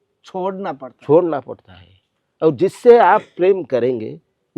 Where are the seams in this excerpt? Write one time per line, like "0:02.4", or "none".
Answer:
none